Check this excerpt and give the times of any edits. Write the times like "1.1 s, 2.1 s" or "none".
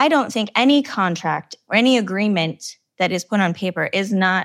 1.5 s